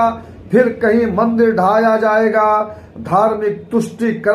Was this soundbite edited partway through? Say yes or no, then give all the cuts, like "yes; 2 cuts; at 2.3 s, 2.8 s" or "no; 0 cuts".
no; 0 cuts